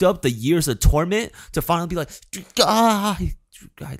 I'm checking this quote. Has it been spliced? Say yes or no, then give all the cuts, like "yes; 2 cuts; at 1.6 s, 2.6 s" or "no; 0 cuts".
no; 0 cuts